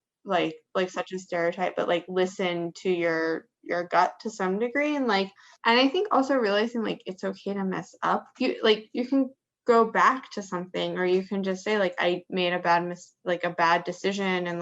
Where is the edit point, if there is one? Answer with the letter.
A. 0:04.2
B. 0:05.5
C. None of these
B